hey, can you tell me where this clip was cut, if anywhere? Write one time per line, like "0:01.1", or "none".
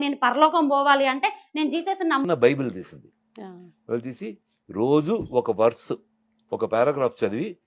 0:02.2